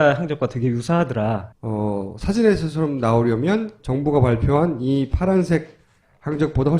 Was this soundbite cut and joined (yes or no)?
yes